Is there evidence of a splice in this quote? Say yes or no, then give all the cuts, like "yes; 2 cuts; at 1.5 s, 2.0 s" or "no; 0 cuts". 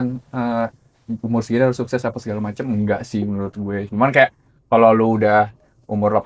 no; 0 cuts